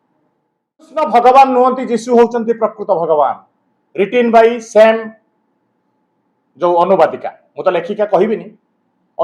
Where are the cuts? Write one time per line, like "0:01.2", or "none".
0:00.9